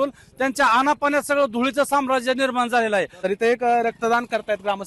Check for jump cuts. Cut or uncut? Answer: uncut